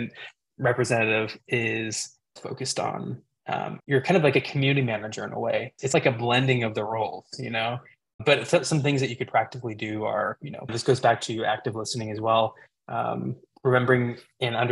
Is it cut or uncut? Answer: cut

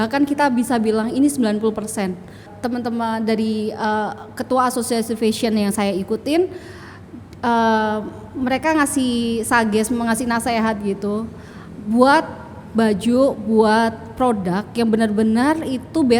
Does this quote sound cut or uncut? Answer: cut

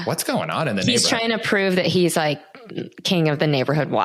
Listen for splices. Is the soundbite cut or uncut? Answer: uncut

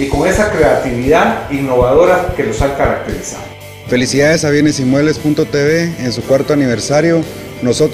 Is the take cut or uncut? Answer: cut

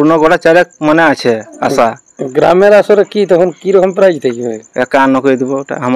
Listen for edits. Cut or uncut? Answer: uncut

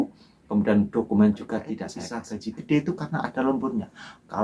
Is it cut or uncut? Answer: cut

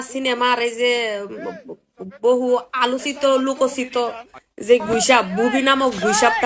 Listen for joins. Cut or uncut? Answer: uncut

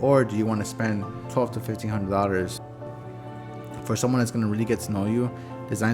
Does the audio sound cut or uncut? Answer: cut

